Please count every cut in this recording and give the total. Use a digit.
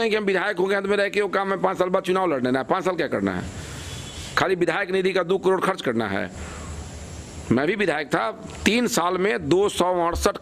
0